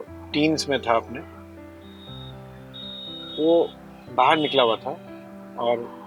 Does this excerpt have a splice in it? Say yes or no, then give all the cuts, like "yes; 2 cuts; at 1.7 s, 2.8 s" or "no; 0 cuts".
no; 0 cuts